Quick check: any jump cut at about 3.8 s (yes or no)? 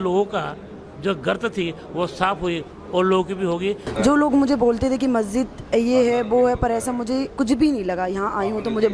yes